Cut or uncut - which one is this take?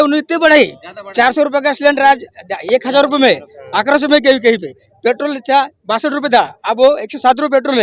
uncut